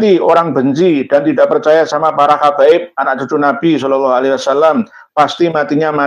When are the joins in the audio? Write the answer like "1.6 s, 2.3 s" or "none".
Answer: none